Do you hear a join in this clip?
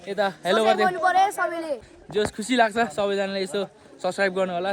yes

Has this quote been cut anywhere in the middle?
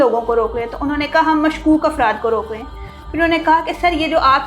no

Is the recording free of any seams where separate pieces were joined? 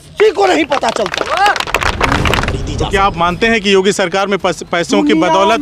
no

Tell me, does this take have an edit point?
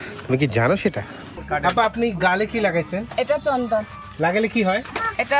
yes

